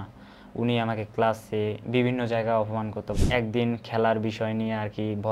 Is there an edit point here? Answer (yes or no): yes